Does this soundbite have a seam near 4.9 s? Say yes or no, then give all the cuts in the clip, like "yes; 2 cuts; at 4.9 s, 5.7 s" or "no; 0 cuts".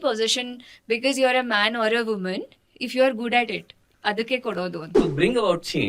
yes; 1 cut; at 4.9 s